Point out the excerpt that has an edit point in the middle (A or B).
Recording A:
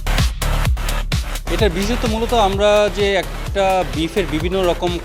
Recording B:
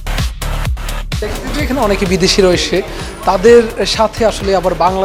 A